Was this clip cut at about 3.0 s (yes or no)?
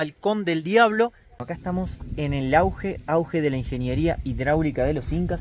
no